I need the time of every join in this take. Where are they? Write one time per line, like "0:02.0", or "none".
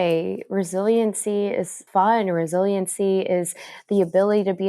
0:01.8